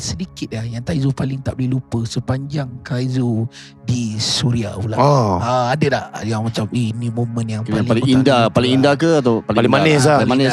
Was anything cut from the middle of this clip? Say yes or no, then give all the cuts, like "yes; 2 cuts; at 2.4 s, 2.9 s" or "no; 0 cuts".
no; 0 cuts